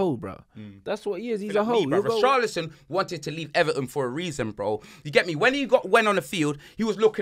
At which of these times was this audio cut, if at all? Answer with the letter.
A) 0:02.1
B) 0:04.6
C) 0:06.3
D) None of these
A